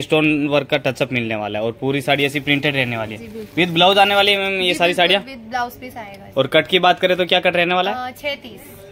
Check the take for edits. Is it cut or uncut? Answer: uncut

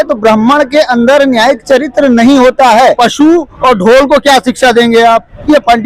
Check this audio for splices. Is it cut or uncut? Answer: cut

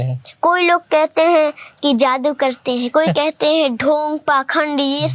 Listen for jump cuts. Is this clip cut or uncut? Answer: uncut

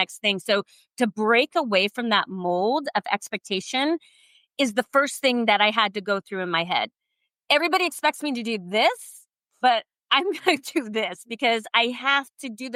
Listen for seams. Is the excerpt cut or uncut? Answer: uncut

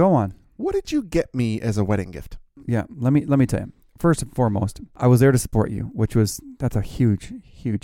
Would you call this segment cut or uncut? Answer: cut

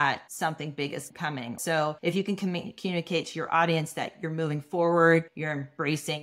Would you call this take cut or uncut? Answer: cut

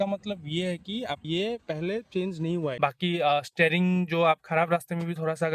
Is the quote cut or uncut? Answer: cut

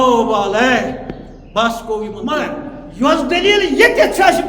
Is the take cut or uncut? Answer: cut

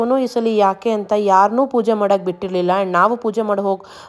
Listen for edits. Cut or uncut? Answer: uncut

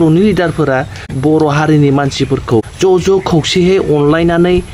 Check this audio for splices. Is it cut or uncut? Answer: cut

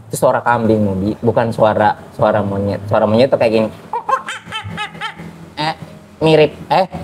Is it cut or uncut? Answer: uncut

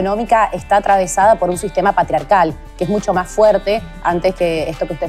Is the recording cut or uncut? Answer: uncut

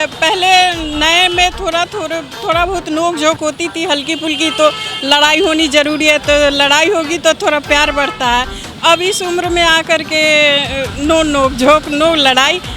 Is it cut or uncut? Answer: uncut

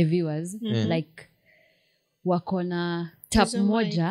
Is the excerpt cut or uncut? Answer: uncut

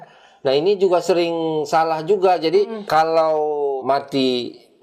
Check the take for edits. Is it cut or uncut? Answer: cut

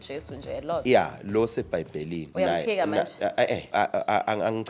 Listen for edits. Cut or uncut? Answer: cut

